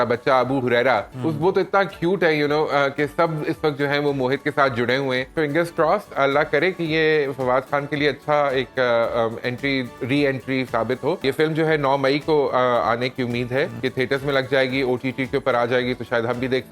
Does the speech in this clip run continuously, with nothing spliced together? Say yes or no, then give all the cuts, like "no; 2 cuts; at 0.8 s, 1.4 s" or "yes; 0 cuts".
no; 4 cuts; at 1.1 s, 5.3 s, 11.2 s, 13.7 s